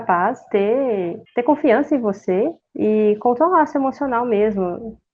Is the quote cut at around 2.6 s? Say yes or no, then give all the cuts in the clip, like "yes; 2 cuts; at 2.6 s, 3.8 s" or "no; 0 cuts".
yes; 2 cuts; at 1.2 s, 2.6 s